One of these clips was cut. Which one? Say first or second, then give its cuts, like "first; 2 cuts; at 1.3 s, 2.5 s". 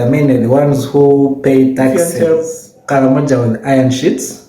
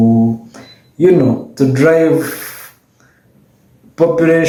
first; 1 cut; at 2.0 s